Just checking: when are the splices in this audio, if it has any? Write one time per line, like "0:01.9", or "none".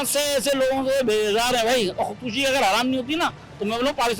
none